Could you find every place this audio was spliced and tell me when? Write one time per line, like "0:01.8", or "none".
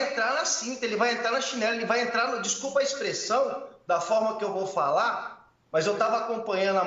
0:03.7